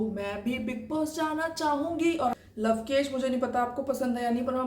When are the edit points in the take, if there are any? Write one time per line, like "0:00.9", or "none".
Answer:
0:02.3